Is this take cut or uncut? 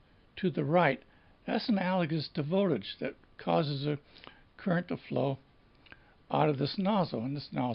uncut